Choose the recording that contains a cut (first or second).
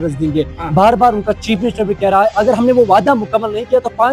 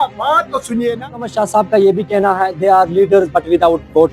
second